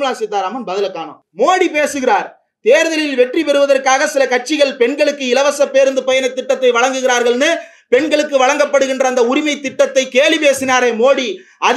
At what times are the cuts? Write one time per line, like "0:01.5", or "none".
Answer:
0:01.2